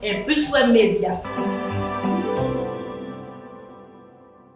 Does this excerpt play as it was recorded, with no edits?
yes; 0 cuts

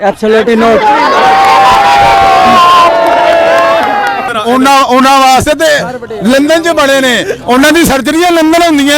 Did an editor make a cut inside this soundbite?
yes; 1 cut; at 4.2 s

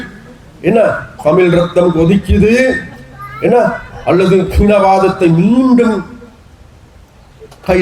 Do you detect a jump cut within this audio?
no; 0 cuts

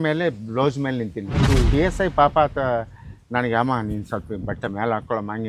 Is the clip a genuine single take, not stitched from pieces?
no; 1 cut; at 1.3 s

